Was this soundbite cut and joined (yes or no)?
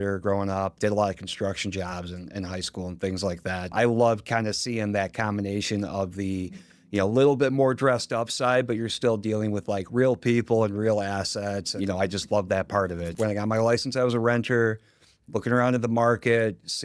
yes